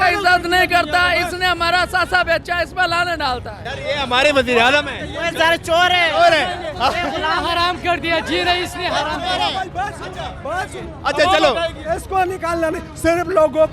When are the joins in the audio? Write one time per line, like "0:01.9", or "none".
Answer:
none

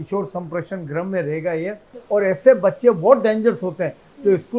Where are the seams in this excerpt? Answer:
0:01.9

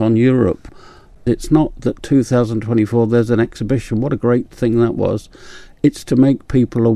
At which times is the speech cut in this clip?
0:01.0

